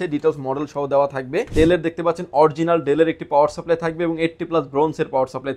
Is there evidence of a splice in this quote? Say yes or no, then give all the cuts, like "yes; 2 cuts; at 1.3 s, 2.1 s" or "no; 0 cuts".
yes; 1 cut; at 1.5 s